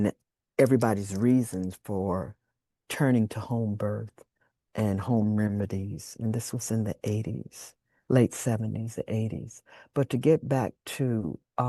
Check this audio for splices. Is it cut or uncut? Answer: uncut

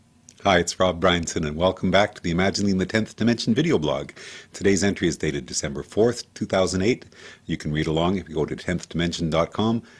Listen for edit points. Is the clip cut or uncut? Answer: cut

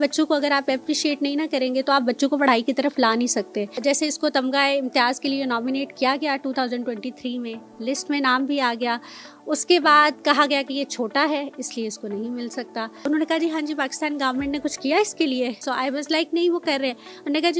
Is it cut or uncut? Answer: cut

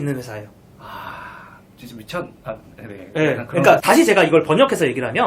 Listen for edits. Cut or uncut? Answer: cut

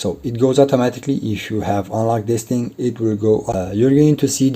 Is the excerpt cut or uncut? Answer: cut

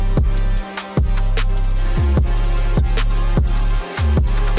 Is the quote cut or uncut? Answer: uncut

